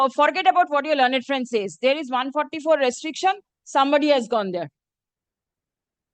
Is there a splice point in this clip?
no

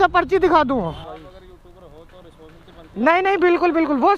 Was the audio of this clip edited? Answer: yes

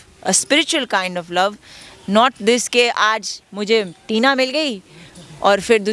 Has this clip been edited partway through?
no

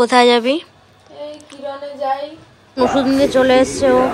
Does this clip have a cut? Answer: yes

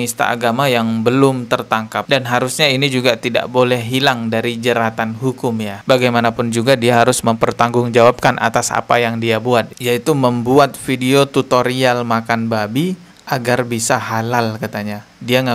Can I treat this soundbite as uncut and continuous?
yes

